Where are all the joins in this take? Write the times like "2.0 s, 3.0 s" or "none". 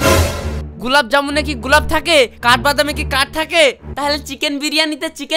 3.9 s